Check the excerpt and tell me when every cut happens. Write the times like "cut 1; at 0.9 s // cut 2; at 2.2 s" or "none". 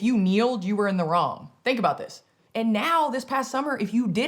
cut 1; at 2.4 s